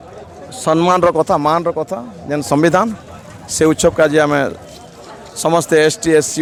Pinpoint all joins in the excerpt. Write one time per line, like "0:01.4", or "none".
none